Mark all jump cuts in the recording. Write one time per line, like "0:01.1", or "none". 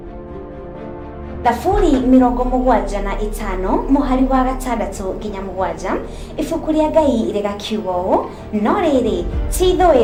none